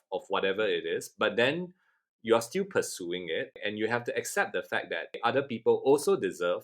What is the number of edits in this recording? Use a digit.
2